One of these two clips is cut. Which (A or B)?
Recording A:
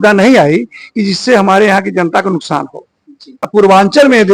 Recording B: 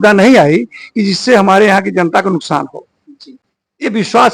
A